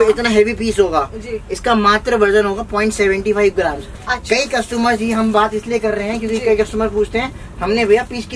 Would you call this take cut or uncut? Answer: uncut